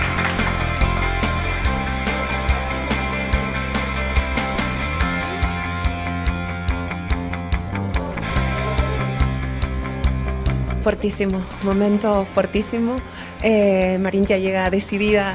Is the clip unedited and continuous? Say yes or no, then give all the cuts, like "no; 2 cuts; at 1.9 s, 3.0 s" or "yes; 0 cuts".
yes; 0 cuts